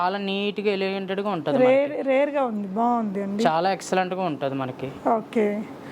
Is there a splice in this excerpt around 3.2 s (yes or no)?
no